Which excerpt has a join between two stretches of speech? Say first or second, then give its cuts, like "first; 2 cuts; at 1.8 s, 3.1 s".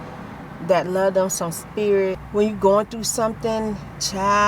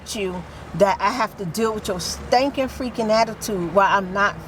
first; 1 cut; at 2.2 s